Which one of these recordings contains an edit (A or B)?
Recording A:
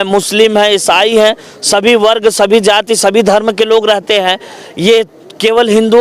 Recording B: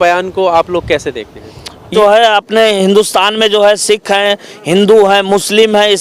B